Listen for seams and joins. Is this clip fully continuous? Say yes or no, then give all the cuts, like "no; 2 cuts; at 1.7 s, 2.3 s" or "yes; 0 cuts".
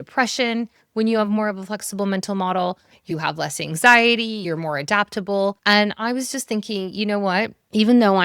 no; 3 cuts; at 3.0 s, 4.4 s, 5.6 s